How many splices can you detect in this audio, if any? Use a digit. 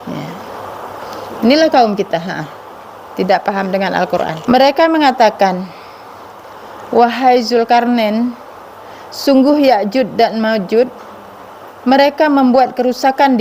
1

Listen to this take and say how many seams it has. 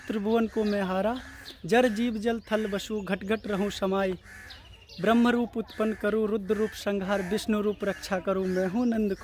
0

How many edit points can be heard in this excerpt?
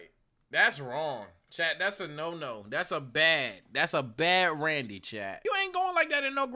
1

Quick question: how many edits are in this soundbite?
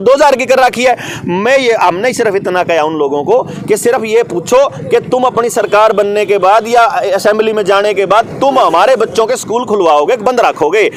0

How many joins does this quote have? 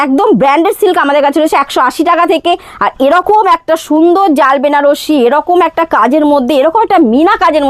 0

